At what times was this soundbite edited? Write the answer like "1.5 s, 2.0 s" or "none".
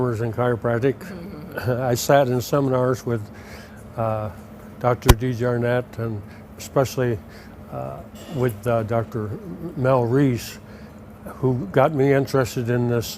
11.0 s